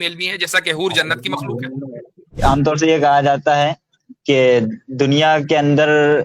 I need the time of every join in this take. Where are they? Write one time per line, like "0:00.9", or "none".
0:02.4